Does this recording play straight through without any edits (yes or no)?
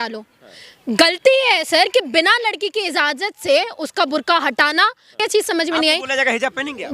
no